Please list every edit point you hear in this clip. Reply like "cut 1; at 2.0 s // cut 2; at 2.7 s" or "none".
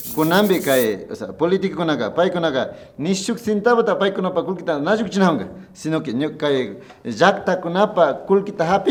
none